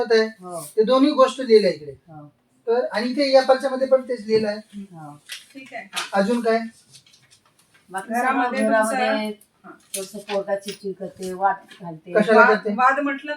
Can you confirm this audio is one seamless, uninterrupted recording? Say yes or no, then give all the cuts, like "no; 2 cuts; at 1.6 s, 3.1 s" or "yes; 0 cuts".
yes; 0 cuts